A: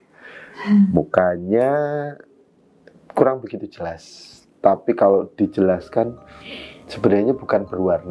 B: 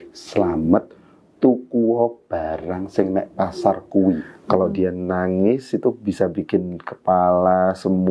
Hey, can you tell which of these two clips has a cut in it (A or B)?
B